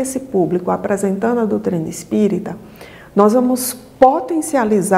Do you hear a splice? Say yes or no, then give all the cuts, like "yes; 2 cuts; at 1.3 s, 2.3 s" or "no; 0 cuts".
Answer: no; 0 cuts